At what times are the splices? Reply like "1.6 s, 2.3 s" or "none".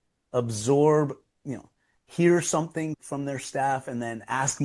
3.0 s